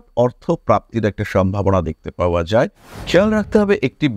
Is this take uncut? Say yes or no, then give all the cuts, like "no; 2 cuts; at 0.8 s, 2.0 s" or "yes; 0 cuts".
no; 1 cut; at 2.9 s